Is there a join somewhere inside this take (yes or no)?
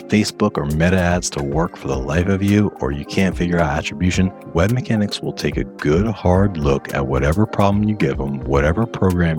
no